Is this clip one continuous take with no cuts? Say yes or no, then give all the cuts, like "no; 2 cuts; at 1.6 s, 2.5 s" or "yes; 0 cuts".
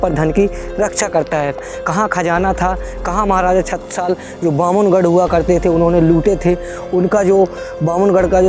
no; 1 cut; at 1.6 s